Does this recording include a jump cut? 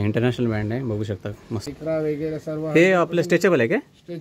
yes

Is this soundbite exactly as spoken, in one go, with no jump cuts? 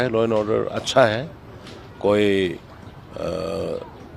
yes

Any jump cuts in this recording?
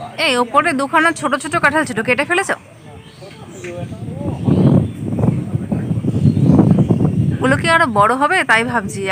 no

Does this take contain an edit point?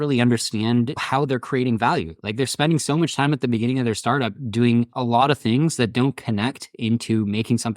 yes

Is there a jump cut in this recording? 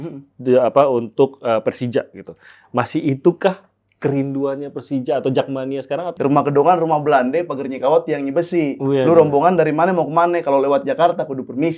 yes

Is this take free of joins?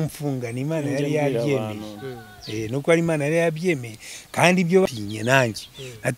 no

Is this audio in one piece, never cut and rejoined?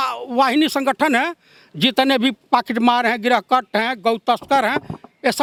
yes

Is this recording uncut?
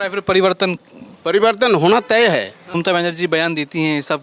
no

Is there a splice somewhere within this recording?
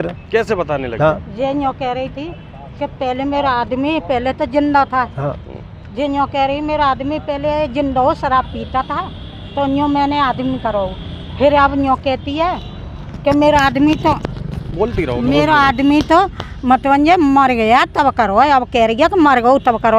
no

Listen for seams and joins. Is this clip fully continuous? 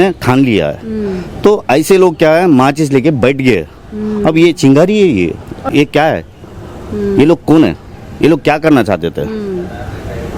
no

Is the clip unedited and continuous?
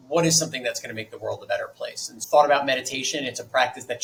yes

